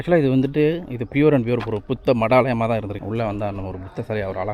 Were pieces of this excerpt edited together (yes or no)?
yes